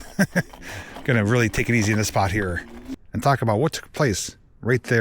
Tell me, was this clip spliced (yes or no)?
yes